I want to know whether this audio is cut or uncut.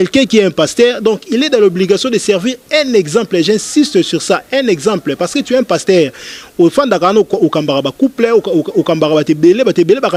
uncut